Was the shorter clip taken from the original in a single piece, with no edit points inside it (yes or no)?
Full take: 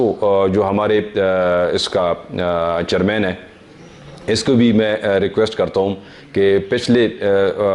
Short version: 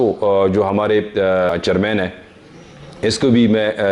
no